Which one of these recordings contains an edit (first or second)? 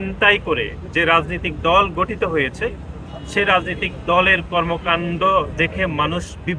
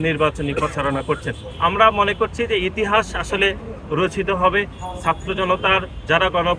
second